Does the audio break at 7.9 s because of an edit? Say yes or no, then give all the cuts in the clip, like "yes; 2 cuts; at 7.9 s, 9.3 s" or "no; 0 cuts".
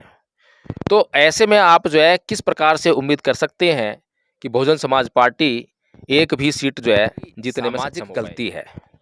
yes; 1 cut; at 7.9 s